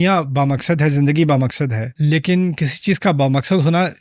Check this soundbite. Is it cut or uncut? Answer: cut